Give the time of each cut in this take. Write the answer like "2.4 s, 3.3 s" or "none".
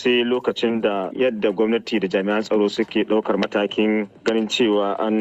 1.1 s